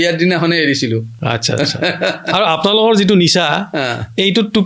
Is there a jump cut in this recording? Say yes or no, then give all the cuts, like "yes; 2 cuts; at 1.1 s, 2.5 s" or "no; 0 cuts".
no; 0 cuts